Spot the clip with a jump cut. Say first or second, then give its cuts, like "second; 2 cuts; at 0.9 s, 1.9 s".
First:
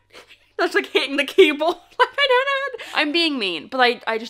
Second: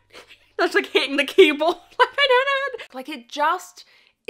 second; 1 cut; at 2.8 s